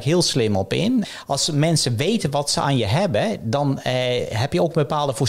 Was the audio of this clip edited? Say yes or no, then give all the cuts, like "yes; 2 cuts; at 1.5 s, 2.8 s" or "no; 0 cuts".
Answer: yes; 1 cut; at 1.1 s